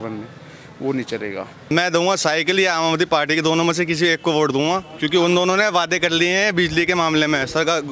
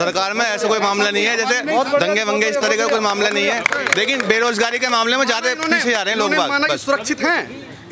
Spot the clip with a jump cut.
first; 1 cut; at 1.7 s

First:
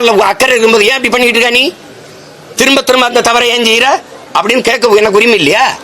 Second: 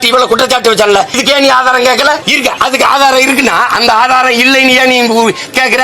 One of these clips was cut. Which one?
second; 2 cuts; at 1.2 s, 2.3 s

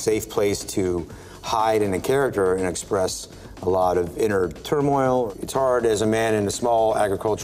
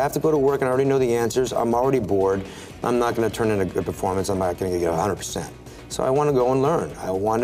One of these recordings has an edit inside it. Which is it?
first; 1 cut; at 5.3 s

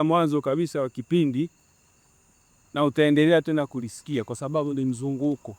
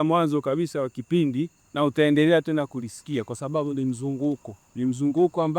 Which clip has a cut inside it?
second; 2 cuts; at 1.6 s, 4.6 s

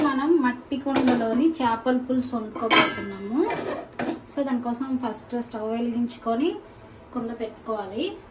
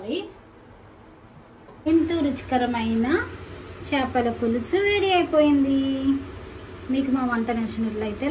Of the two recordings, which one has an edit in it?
second; 1 cut; at 1.9 s

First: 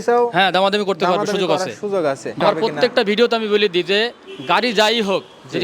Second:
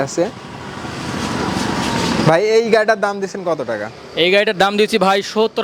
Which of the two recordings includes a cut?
first; 1 cut; at 2.4 s

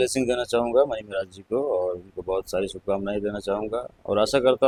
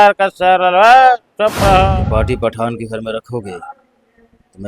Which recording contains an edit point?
second; 1 cut; at 2.0 s

